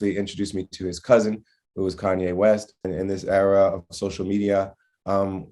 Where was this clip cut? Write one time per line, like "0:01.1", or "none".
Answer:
0:02.9